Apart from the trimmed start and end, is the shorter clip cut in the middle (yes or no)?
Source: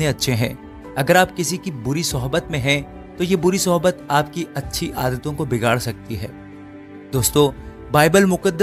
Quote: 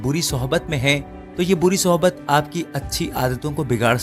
no